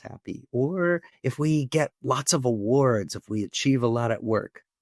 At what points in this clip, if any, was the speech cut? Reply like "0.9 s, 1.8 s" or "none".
1.2 s